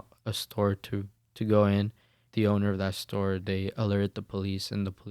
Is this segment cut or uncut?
cut